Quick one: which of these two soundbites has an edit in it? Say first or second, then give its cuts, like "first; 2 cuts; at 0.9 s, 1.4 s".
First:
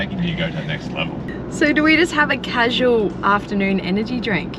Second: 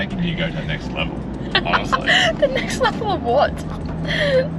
first; 1 cut; at 1.3 s